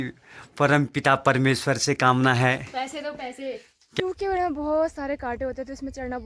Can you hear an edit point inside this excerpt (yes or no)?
yes